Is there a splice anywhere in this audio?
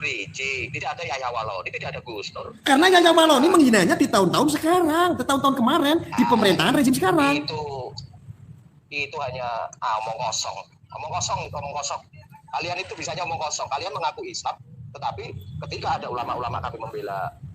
no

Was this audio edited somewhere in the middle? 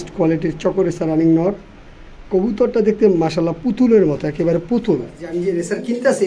yes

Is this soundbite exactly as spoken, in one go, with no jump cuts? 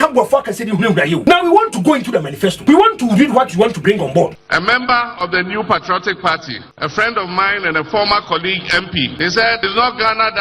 no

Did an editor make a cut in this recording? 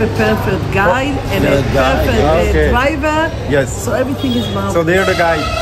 no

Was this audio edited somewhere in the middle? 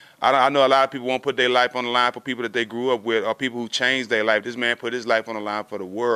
no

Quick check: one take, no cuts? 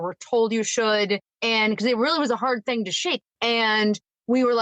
no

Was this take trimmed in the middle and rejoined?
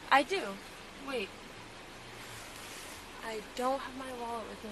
no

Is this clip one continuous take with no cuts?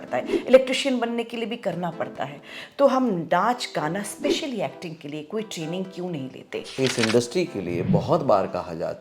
no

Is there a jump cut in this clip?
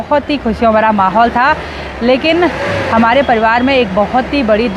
no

